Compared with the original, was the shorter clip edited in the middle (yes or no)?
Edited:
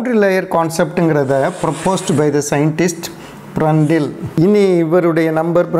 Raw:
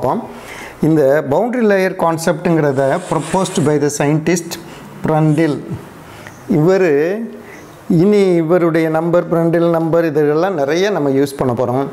yes